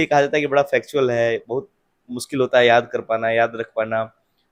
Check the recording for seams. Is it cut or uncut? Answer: uncut